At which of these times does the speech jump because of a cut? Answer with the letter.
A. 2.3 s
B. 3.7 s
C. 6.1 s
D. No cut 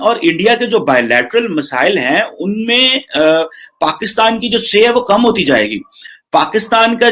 D